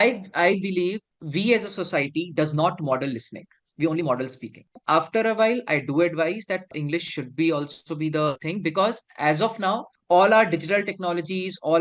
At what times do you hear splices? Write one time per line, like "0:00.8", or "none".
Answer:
0:04.8